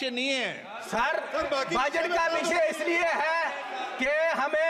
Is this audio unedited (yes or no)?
yes